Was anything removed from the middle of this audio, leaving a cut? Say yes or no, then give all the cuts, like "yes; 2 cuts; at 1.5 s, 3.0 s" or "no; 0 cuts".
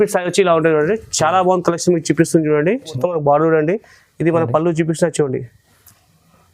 yes; 1 cut; at 3.0 s